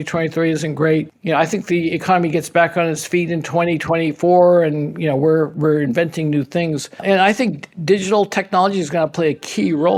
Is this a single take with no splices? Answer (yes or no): yes